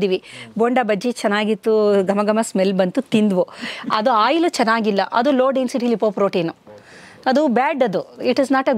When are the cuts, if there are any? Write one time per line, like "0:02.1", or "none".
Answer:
none